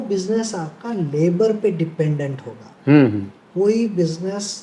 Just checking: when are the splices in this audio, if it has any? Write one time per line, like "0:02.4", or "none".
none